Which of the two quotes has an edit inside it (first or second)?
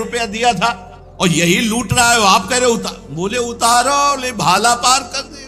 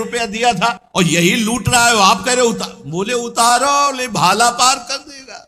second